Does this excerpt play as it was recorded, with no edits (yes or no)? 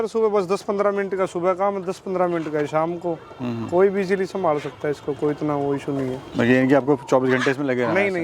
yes